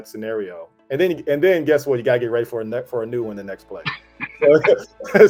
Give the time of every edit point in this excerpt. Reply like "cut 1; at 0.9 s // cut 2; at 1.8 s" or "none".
none